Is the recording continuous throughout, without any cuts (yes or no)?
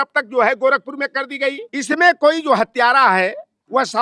no